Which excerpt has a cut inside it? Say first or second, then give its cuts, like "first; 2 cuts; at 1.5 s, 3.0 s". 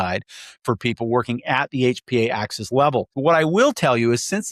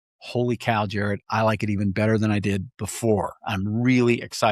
first; 1 cut; at 3.1 s